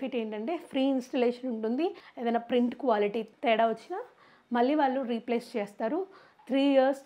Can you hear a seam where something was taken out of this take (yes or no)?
yes